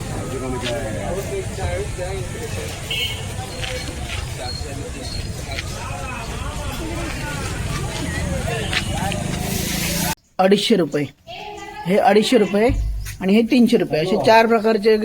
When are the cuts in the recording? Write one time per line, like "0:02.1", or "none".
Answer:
0:10.1